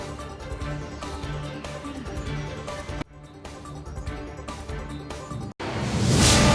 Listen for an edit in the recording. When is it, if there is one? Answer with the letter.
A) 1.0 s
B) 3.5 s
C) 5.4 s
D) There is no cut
C